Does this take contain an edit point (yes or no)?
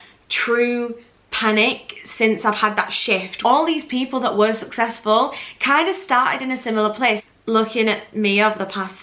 yes